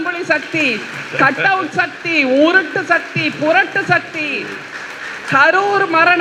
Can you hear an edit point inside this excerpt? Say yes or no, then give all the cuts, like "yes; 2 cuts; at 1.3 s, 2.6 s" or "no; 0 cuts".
no; 0 cuts